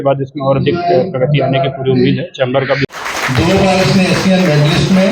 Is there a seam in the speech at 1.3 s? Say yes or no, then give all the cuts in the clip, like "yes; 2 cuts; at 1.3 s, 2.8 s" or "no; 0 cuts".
no; 1 cut; at 2.9 s